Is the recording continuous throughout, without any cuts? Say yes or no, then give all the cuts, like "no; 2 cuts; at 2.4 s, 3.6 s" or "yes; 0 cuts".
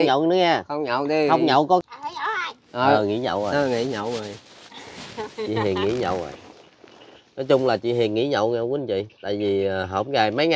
no; 1 cut; at 1.8 s